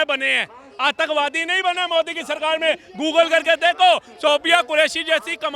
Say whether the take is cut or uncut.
uncut